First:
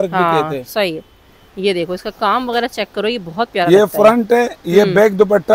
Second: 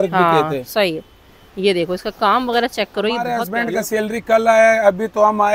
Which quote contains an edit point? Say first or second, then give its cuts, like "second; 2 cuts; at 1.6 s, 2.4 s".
second; 1 cut; at 3.4 s